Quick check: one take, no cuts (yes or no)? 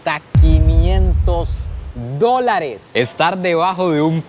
no